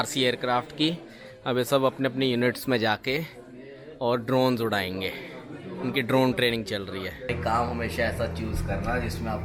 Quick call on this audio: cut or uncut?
cut